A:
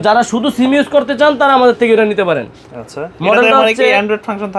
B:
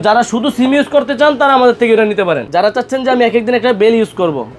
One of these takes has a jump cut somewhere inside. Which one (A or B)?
B